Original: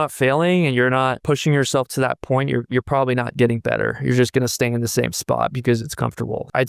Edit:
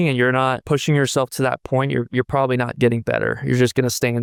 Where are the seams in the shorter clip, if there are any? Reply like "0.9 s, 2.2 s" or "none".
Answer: none